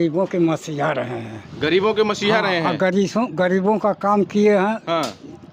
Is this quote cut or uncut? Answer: uncut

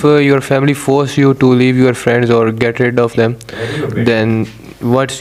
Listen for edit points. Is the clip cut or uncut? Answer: uncut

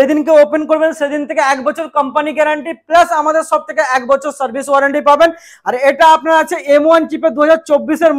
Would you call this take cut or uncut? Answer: uncut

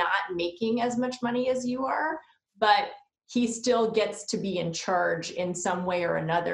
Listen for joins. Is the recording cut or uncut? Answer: uncut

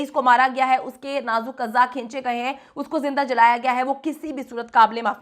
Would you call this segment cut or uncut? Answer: uncut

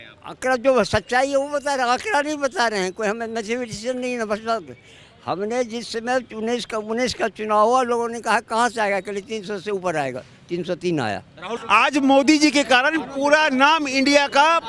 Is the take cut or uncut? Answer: cut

